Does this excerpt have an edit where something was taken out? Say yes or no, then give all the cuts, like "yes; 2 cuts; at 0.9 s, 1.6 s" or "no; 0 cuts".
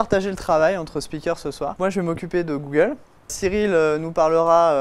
yes; 2 cuts; at 1.7 s, 3.3 s